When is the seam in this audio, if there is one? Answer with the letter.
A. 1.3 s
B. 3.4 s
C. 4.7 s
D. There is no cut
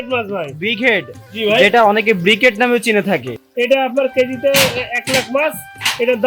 B